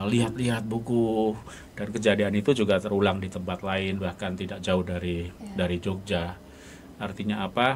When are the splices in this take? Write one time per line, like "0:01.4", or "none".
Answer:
none

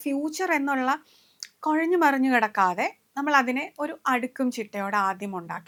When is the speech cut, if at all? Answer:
none

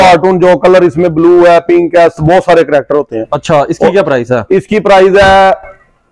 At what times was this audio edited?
none

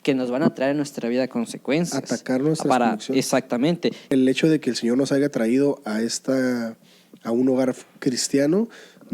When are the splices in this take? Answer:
0:04.0

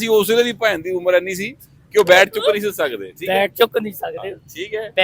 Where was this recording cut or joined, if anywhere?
none

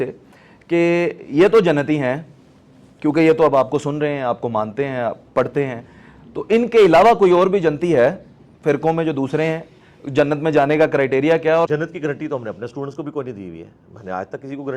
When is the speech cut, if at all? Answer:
0:11.7

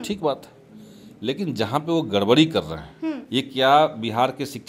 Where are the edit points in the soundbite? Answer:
0:03.2

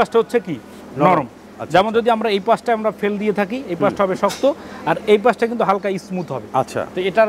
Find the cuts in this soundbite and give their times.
none

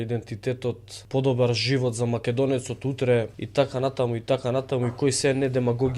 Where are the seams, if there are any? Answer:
0:00.9
0:03.4

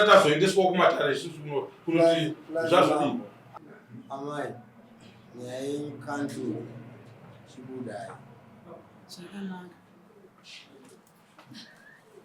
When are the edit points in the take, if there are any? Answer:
0:03.4

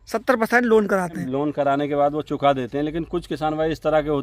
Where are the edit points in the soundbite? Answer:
0:01.2

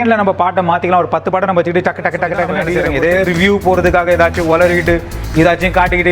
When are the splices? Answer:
0:02.8

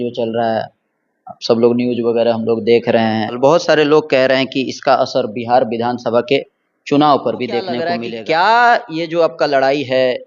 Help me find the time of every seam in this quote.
0:03.4
0:07.9

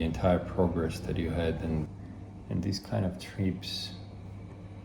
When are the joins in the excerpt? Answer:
0:01.9

